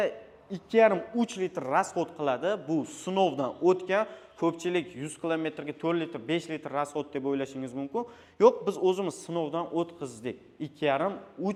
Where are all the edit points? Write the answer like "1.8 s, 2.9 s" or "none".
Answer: none